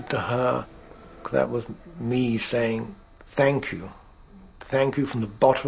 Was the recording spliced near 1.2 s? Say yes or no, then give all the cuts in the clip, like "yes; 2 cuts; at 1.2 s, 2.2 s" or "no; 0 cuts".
yes; 1 cut; at 1.2 s